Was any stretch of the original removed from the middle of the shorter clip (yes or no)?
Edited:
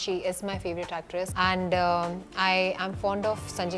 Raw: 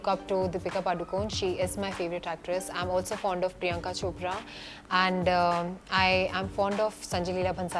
yes